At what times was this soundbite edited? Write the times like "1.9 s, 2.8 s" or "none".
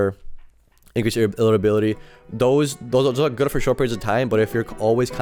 none